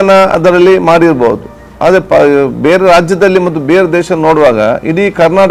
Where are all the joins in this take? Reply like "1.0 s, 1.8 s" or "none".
none